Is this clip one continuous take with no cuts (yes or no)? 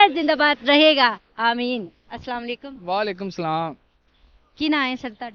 yes